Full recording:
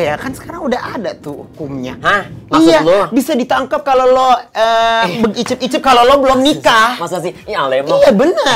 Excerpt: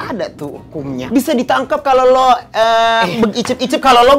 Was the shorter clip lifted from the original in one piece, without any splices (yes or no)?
no